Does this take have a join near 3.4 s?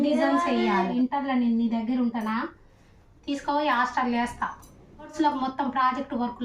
no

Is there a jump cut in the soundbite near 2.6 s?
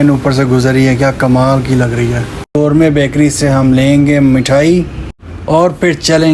yes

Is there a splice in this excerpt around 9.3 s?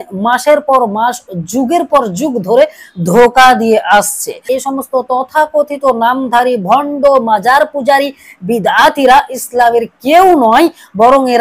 no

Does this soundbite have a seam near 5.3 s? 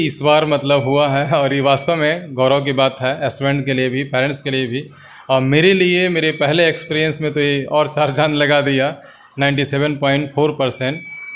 no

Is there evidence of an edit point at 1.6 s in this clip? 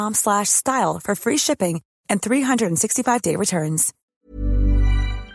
no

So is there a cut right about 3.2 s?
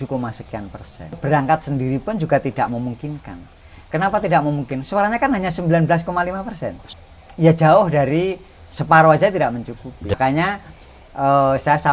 no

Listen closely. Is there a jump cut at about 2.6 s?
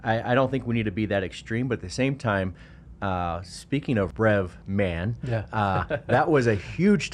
no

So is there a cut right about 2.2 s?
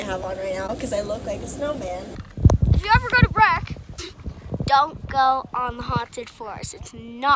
yes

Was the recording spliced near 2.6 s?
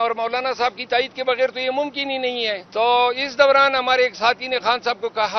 yes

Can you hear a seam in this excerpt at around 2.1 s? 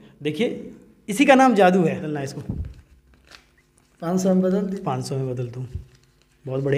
yes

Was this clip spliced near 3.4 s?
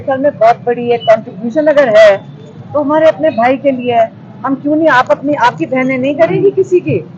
no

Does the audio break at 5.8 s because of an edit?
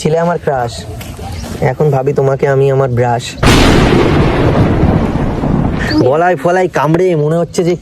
yes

